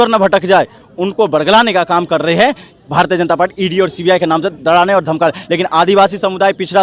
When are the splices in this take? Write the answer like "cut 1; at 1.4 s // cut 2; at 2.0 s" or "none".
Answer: none